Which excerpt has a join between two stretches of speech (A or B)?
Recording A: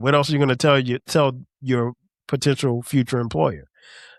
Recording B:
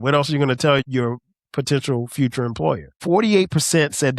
B